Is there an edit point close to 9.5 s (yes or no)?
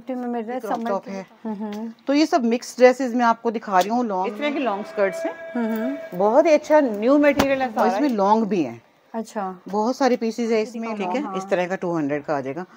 no